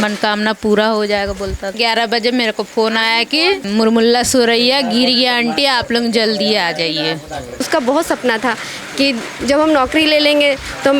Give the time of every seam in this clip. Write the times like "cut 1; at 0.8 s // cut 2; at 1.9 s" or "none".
cut 1; at 1.8 s // cut 2; at 3.7 s // cut 3; at 7.7 s